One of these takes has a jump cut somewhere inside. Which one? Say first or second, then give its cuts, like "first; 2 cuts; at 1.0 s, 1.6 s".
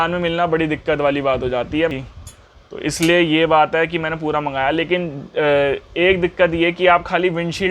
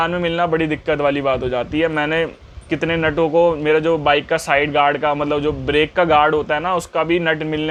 first; 1 cut; at 1.9 s